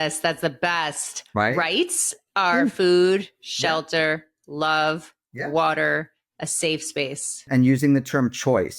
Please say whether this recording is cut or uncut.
cut